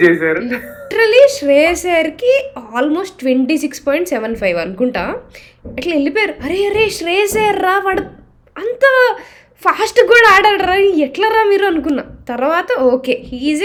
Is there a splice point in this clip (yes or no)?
no